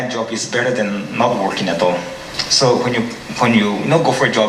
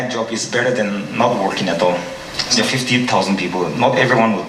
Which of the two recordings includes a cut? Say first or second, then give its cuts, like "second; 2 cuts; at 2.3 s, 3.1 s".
second; 1 cut; at 2.5 s